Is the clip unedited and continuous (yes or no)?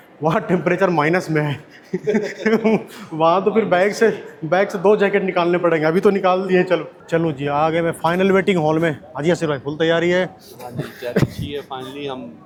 yes